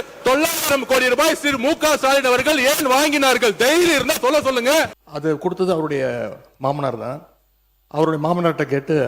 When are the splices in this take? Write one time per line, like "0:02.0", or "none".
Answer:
0:05.0